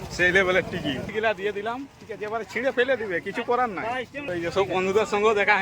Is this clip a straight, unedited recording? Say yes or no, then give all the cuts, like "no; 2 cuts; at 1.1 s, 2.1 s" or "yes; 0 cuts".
no; 2 cuts; at 1.1 s, 4.2 s